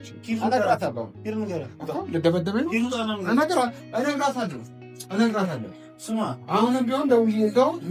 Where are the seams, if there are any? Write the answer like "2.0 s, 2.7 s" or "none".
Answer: none